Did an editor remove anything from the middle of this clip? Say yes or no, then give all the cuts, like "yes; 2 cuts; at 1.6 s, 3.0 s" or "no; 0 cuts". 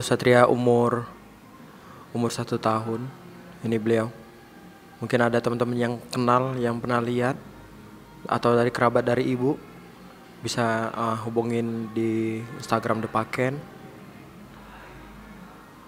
no; 0 cuts